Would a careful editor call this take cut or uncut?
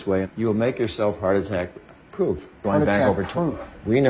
uncut